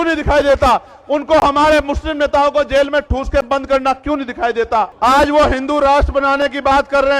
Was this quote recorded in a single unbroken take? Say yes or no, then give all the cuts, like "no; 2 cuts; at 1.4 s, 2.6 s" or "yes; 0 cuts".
no; 1 cut; at 4.9 s